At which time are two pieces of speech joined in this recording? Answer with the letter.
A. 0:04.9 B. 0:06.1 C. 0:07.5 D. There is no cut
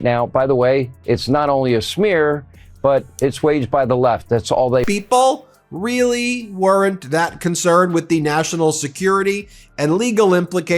A